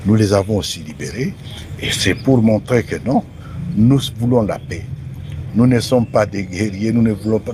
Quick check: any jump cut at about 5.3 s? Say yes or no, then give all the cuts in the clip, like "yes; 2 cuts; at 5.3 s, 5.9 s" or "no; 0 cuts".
no; 0 cuts